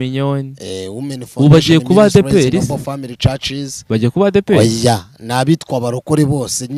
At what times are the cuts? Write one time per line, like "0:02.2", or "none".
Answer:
none